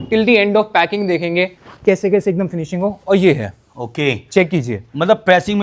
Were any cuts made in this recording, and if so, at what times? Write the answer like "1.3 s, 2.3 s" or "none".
1.6 s